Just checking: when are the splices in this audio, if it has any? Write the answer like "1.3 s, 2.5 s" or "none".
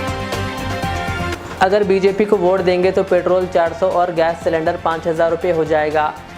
1.3 s